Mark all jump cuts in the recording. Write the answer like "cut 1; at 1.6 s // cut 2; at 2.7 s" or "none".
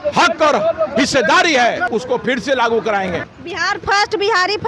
cut 1; at 1.8 s // cut 2; at 3.3 s